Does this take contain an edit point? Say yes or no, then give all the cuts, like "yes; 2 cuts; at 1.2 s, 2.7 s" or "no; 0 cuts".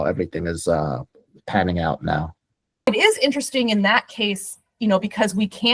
yes; 1 cut; at 2.9 s